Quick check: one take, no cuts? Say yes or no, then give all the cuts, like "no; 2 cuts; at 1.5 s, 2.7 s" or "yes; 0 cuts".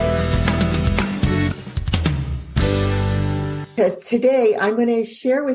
no; 1 cut; at 3.7 s